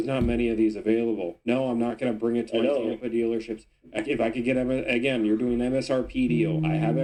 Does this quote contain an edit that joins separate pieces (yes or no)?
no